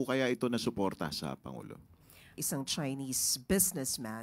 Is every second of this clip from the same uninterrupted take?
no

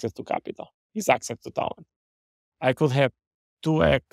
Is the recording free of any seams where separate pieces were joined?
yes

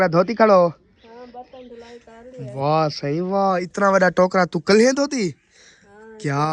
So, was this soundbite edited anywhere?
no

